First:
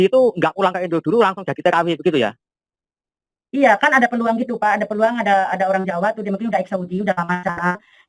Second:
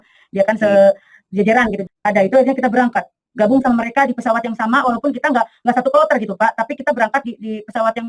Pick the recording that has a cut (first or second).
second